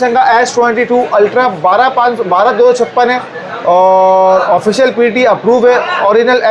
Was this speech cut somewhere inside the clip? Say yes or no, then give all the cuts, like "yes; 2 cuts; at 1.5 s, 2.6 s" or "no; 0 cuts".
no; 0 cuts